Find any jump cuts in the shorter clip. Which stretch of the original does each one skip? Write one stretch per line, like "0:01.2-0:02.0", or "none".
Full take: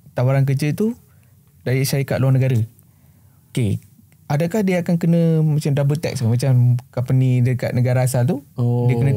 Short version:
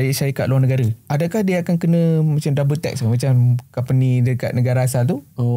0:02.7-0:04.2